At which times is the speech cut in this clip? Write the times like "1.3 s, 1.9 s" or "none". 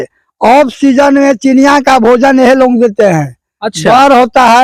none